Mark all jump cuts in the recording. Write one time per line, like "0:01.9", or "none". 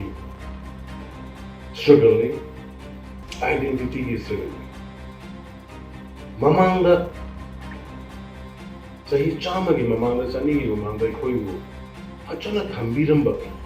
0:07.7
0:09.1